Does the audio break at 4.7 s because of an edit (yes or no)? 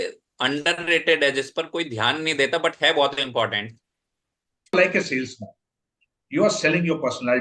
yes